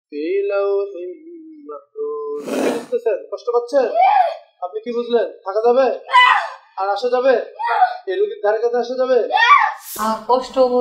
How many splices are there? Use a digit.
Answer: 2